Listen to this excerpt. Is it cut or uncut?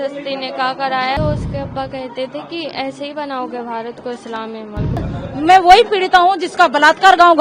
cut